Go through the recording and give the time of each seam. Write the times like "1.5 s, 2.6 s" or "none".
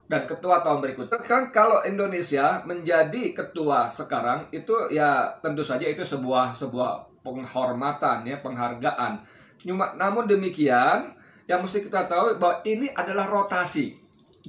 none